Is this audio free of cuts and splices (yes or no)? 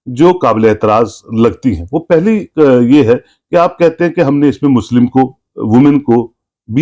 yes